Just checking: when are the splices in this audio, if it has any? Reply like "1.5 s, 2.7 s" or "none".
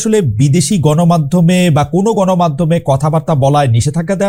none